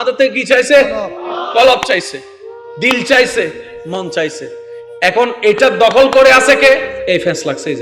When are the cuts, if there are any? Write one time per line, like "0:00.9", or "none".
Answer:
0:06.9